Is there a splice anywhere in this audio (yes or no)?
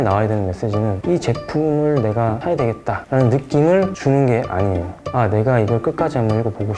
yes